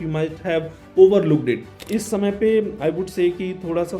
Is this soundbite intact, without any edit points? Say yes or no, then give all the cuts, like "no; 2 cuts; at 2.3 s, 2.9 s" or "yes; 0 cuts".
no; 1 cut; at 1.8 s